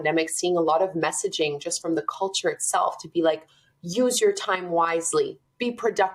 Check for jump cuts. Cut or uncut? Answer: uncut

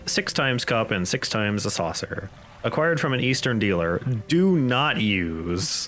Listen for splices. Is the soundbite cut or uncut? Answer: uncut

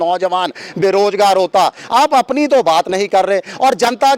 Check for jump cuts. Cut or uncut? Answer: uncut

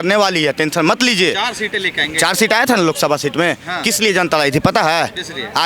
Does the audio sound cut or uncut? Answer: uncut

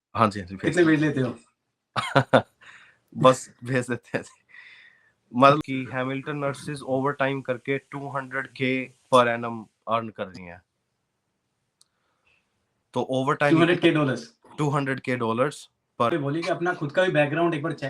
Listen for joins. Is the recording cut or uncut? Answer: cut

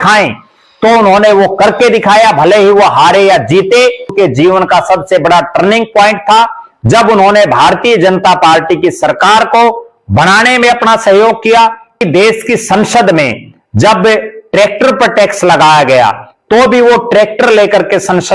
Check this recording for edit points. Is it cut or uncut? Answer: cut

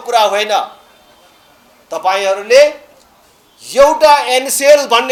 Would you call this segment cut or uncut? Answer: uncut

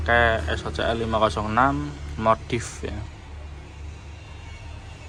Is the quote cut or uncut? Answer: uncut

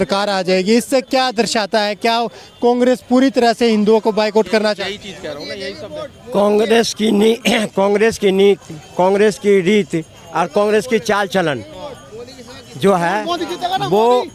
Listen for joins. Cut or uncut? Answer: uncut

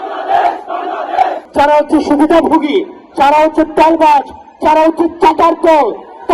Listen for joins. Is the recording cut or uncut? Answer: cut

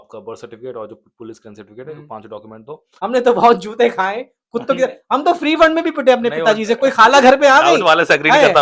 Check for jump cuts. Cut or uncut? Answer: cut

